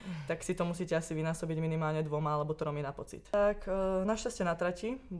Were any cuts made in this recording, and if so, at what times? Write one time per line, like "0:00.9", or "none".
0:03.3